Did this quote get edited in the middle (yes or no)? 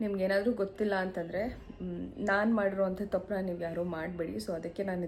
no